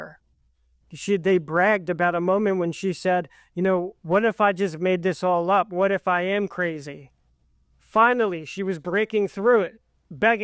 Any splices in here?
no; 0 cuts

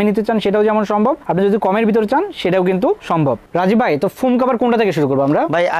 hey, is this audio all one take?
yes; 0 cuts

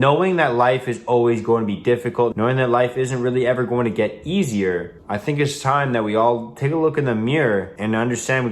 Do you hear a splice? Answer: yes; 3 cuts; at 2.3 s, 5.0 s, 7.7 s

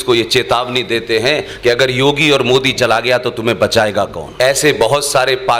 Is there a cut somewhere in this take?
yes; 1 cut; at 4.2 s

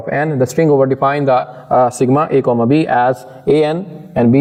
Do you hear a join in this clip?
no; 0 cuts

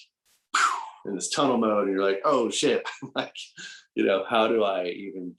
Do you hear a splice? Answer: no; 0 cuts

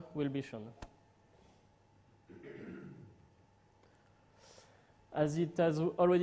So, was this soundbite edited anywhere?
no; 0 cuts

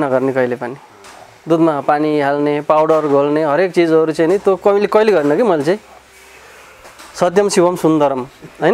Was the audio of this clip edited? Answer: no; 0 cuts

